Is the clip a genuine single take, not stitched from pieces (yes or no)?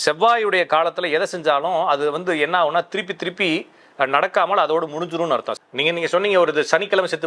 no